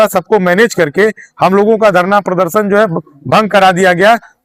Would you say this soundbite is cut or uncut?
uncut